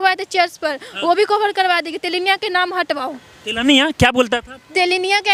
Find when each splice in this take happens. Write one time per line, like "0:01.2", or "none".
none